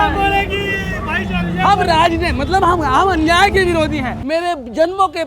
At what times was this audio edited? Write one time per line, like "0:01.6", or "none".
0:04.2